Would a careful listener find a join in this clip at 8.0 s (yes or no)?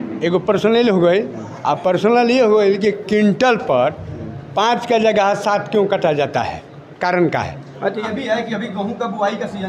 yes